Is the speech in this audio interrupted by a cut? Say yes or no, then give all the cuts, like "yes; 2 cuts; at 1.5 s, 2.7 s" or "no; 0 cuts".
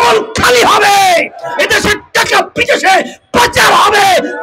no; 0 cuts